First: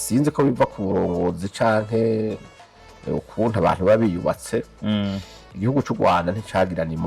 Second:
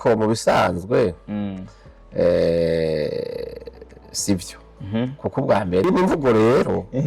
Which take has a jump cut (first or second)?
second